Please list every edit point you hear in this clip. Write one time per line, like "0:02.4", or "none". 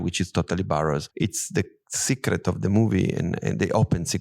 0:01.1
0:01.9